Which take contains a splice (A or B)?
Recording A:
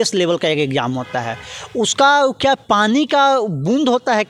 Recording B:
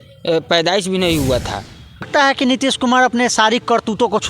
B